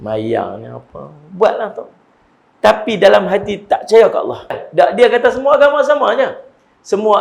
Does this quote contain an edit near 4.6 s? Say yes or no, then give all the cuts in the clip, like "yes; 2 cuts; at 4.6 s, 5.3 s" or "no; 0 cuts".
yes; 1 cut; at 4.6 s